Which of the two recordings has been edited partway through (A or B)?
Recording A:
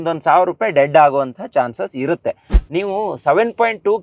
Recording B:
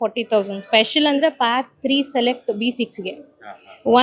A